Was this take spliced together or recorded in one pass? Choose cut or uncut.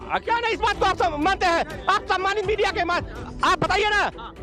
uncut